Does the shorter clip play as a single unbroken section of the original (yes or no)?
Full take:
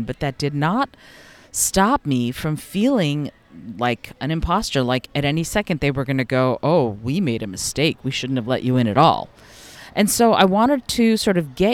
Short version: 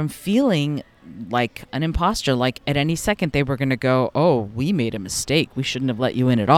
yes